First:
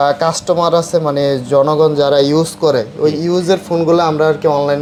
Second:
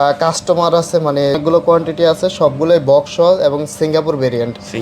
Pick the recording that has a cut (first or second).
second